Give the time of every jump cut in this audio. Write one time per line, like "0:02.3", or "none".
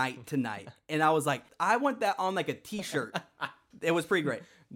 0:01.5